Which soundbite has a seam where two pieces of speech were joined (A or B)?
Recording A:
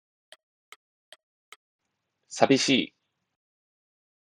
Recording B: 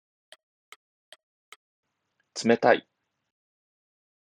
A